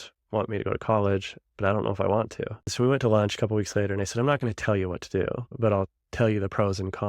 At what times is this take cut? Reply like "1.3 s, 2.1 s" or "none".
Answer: 2.7 s